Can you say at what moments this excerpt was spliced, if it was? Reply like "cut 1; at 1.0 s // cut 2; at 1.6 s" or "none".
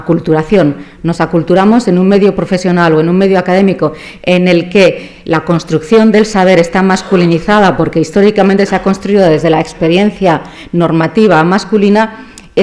cut 1; at 5.0 s